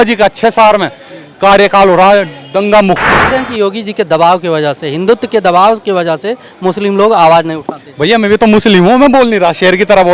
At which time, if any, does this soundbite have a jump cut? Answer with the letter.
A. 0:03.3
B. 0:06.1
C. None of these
A